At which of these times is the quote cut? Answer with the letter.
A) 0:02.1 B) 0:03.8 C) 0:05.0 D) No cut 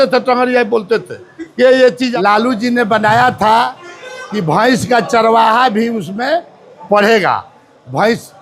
A